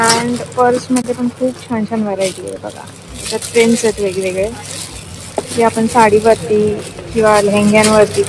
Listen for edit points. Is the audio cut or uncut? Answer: uncut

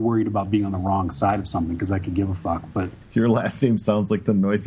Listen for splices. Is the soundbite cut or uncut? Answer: cut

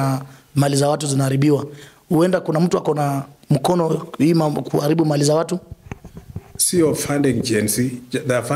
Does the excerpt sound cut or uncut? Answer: uncut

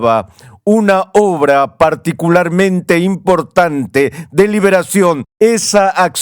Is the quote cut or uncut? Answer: cut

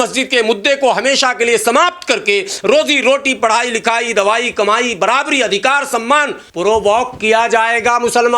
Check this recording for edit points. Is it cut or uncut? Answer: cut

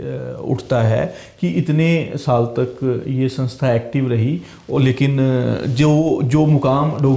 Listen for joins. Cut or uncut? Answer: uncut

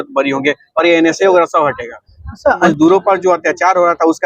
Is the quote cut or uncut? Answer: cut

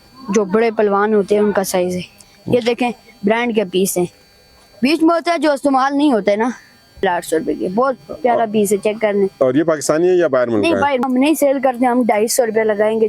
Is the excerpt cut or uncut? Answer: cut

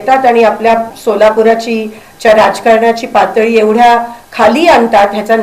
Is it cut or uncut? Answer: cut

